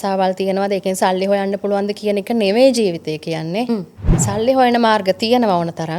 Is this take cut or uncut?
cut